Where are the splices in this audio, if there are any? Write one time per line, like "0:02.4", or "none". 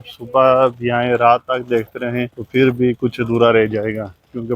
0:02.4